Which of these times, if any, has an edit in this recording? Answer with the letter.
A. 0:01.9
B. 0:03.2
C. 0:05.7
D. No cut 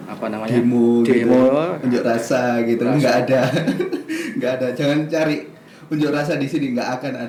D